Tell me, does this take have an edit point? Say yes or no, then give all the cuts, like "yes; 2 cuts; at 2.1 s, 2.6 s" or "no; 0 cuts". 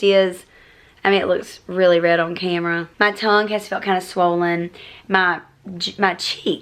yes; 1 cut; at 2.9 s